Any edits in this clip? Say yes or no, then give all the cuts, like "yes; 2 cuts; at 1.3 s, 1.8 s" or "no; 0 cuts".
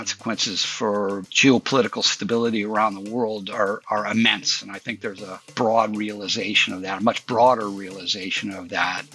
yes; 1 cut; at 5.5 s